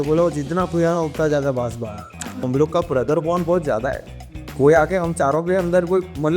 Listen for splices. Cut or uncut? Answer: cut